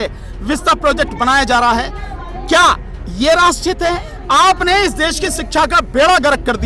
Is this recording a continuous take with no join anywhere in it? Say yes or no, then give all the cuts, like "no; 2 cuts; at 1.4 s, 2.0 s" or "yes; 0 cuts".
no; 1 cut; at 4.1 s